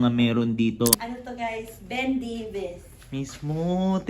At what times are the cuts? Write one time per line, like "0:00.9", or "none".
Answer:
0:01.0